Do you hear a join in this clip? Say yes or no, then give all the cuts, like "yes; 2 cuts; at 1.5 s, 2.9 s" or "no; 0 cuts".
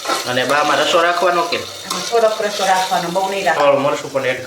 yes; 1 cut; at 3.6 s